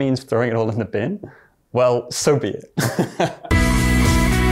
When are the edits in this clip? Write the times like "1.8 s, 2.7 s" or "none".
3.4 s